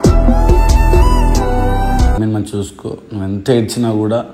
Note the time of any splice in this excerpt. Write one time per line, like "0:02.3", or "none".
0:02.2